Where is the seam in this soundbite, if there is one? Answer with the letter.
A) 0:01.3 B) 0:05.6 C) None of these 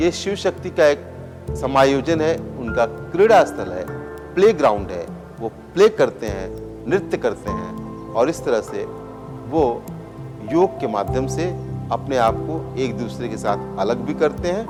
C